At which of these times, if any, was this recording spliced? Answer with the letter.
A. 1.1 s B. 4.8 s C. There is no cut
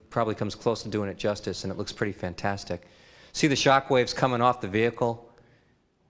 C